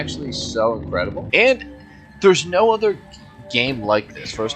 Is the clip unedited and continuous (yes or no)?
no